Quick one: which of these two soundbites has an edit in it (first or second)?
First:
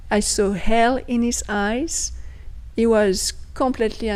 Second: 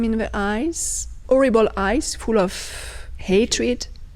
second